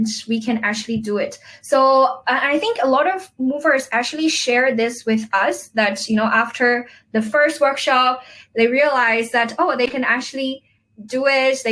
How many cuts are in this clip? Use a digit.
0